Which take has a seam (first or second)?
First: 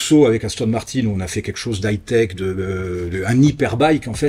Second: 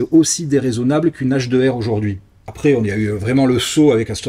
second